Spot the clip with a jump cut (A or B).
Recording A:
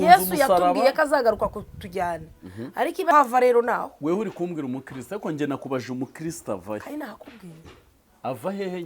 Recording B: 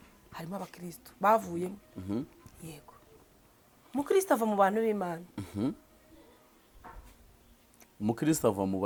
A